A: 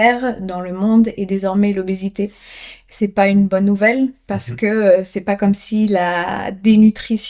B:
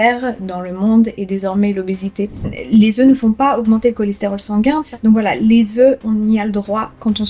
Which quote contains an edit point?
B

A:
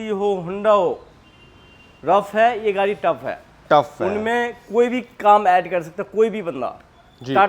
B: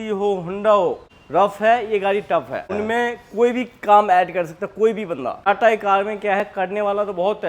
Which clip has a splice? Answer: B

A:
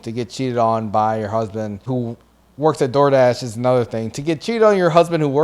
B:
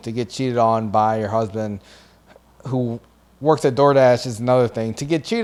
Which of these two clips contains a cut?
A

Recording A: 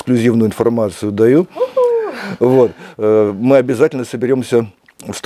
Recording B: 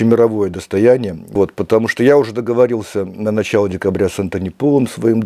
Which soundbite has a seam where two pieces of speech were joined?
B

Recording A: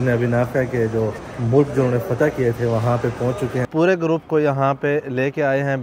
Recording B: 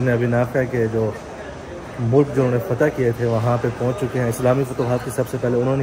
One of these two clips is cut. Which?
A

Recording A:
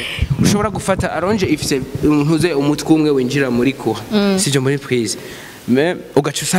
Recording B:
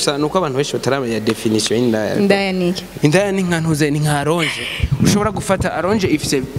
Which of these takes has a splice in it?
B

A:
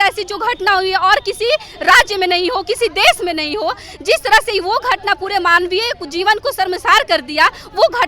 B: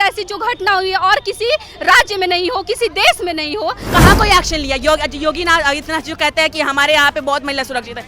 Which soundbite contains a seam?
B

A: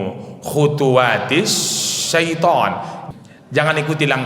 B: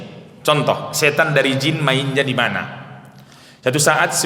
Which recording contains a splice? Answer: A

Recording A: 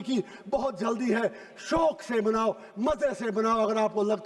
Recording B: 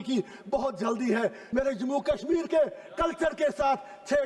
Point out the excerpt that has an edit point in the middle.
B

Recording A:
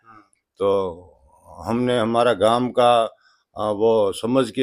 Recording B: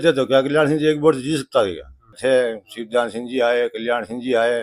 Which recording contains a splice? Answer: B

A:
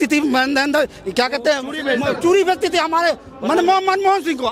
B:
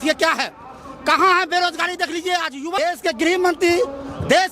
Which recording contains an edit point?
B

